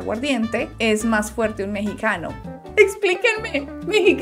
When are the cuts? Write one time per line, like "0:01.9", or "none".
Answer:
0:02.3